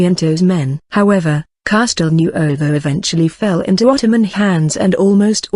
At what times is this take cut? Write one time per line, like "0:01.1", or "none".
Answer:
0:01.2